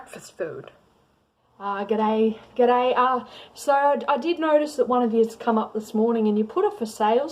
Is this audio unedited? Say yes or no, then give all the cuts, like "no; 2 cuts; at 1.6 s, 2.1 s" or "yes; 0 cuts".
no; 1 cut; at 1.4 s